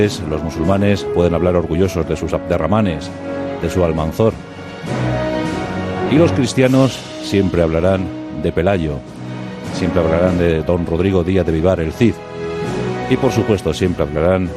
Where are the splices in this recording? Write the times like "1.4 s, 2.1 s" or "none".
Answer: 2.9 s